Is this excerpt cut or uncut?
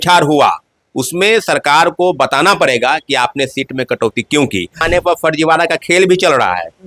cut